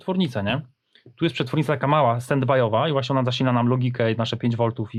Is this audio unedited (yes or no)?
yes